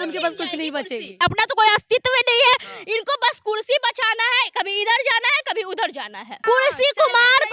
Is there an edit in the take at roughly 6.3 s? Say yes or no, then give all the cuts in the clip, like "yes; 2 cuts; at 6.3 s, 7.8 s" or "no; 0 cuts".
yes; 2 cuts; at 1.2 s, 6.3 s